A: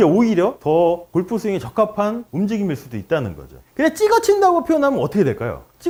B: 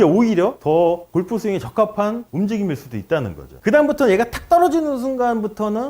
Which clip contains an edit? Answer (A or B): B